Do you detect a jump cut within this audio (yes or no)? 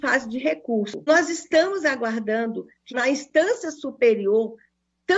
yes